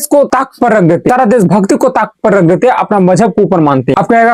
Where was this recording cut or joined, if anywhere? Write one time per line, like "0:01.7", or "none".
none